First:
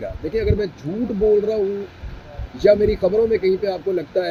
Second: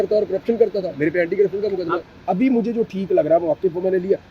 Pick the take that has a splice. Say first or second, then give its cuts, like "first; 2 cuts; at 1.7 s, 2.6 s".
second; 1 cut; at 2.1 s